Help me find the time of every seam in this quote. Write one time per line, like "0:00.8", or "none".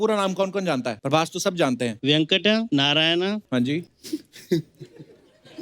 0:01.0
0:02.0
0:02.7
0:03.7